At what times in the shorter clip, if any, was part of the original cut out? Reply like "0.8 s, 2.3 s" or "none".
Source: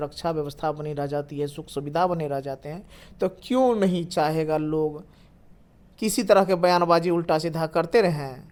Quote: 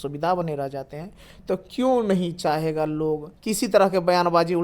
3.3 s